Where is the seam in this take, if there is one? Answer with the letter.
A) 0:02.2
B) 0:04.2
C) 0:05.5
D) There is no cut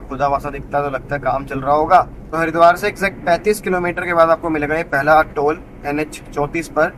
A